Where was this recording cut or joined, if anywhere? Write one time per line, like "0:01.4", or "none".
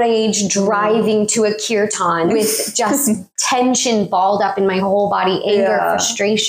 0:03.3